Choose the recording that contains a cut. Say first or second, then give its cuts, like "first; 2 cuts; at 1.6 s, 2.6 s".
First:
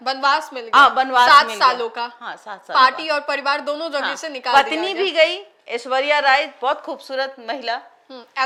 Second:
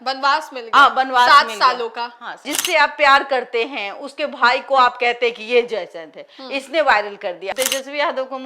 second; 2 cuts; at 2.5 s, 7.5 s